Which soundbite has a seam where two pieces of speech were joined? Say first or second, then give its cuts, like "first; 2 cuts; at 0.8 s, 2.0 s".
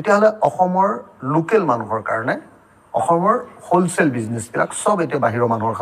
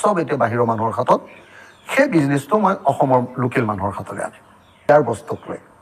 second; 1 cut; at 4.9 s